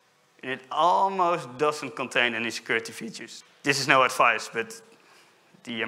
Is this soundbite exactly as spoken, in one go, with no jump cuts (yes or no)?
no